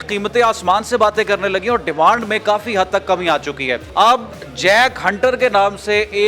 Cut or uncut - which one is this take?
cut